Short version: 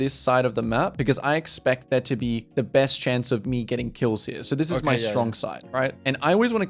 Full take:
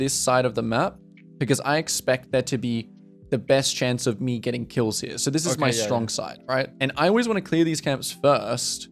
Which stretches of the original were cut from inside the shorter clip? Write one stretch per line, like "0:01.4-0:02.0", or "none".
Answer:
0:01.0-0:01.4
0:02.9-0:03.2